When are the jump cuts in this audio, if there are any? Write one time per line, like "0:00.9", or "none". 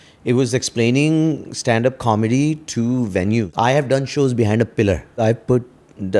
0:03.5
0:05.2